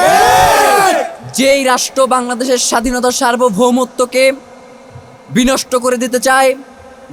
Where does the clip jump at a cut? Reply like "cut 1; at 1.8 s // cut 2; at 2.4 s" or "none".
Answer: none